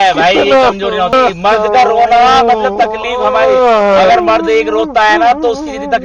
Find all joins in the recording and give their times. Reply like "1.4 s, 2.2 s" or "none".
1.1 s

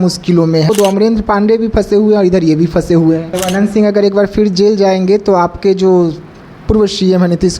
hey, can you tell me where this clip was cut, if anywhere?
0.7 s, 3.3 s

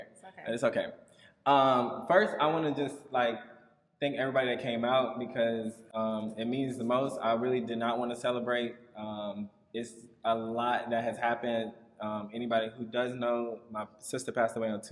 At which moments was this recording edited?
none

